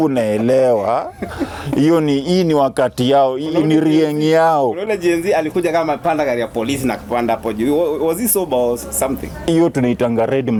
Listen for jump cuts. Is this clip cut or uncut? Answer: uncut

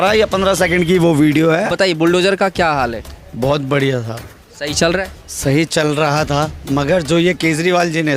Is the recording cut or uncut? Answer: cut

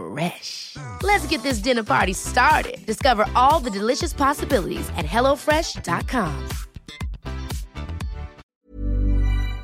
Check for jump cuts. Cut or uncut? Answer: cut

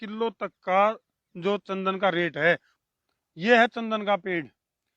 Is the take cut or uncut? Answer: cut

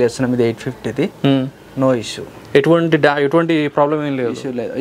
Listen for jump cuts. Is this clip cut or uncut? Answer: uncut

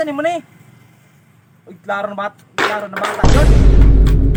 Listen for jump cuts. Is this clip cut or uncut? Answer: uncut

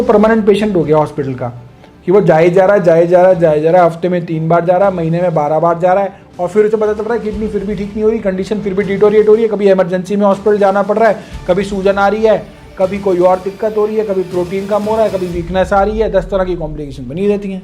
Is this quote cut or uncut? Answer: uncut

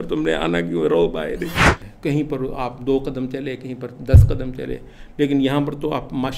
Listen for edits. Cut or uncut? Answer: cut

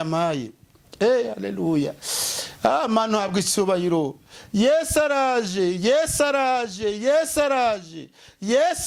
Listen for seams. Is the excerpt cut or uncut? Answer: uncut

